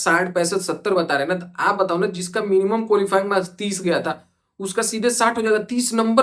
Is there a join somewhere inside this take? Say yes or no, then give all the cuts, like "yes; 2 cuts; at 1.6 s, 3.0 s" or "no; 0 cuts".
no; 0 cuts